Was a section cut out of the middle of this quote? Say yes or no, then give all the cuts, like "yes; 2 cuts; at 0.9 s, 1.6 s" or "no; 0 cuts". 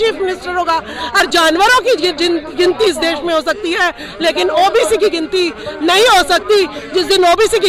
yes; 1 cut; at 1.2 s